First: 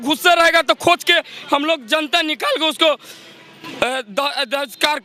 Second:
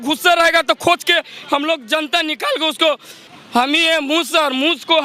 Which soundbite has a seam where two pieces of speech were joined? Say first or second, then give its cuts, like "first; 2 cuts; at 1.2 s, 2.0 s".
second; 1 cut; at 3.3 s